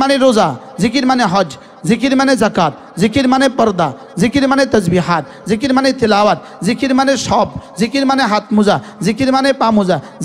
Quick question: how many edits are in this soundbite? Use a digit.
0